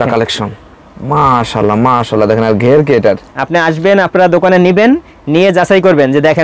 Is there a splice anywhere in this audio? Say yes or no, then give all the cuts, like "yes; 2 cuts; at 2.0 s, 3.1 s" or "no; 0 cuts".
yes; 1 cut; at 3.3 s